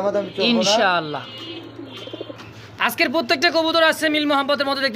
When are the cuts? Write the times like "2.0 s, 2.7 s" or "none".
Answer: none